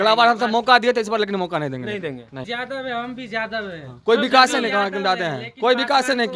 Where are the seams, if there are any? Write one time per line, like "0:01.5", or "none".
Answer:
0:02.5